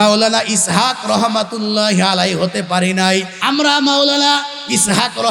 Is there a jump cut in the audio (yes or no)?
yes